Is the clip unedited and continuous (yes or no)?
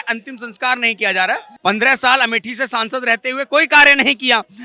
no